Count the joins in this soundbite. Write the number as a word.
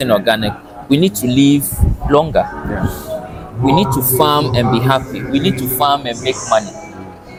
zero